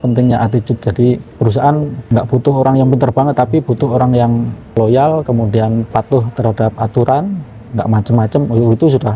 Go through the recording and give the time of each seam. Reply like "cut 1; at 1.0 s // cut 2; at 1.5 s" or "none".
cut 1; at 1.3 s // cut 2; at 2.0 s // cut 3; at 4.7 s // cut 4; at 5.9 s